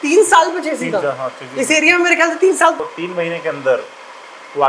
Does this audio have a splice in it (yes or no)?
yes